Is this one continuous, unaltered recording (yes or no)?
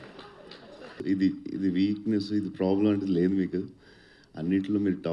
no